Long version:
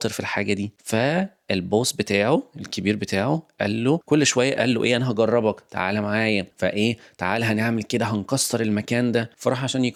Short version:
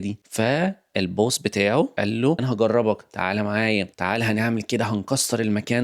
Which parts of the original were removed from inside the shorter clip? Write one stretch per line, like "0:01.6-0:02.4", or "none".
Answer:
0:02.9-0:04.9
0:06.5-0:07.1

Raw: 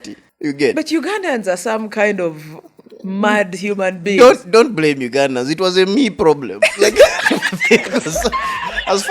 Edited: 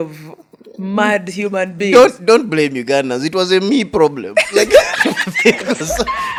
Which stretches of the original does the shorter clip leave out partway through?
none

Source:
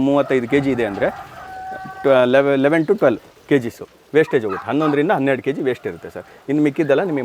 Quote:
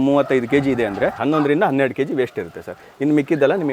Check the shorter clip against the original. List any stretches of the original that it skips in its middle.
0:01.2-0:04.6

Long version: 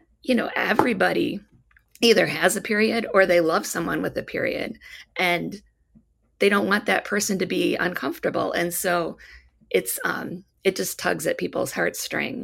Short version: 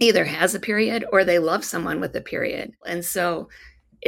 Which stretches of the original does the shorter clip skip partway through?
0:04.9-0:08.6

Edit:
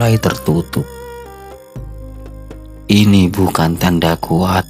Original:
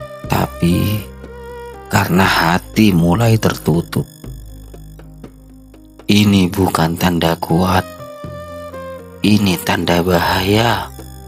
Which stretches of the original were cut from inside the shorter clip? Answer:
none

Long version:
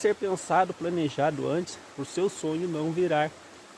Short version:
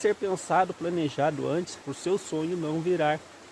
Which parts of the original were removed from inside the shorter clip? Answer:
0:01.8-0:01.9

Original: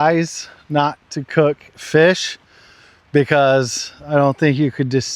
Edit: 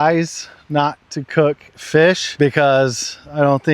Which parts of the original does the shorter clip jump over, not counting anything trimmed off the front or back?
0:02.3-0:03.0

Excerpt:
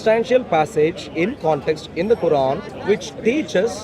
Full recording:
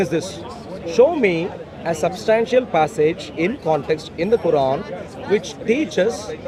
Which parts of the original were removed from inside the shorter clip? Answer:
0:04.9-0:05.1

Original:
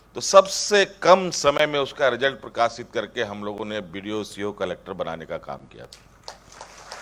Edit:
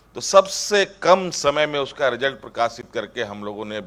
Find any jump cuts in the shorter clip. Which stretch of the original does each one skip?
none

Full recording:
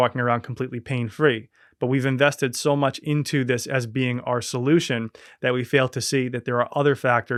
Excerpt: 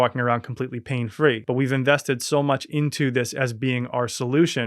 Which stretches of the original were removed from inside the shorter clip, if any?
0:01.4-0:01.7

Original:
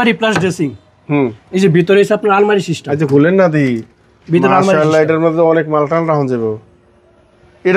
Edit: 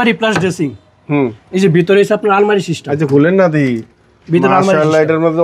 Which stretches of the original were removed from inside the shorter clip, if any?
none

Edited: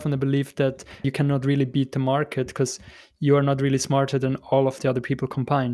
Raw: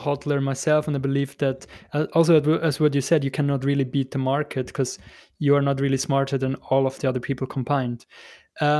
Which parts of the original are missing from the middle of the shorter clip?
0:01.9-0:03.3

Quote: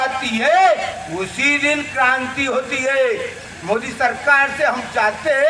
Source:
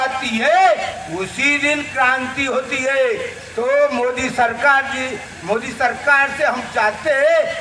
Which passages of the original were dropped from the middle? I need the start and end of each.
0:03.4-0:05.2

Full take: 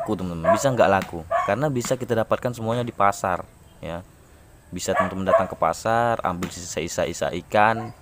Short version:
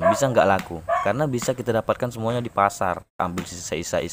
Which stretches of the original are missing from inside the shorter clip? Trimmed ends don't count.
0:03.6-0:06.2

